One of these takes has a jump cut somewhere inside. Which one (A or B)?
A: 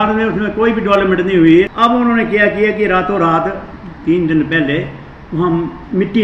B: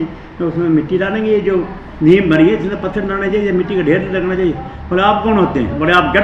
A